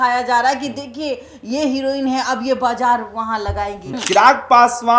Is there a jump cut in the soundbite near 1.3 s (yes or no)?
no